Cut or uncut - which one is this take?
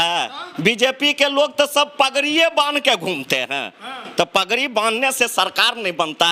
uncut